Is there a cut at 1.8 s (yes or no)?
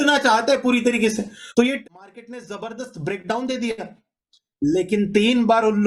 yes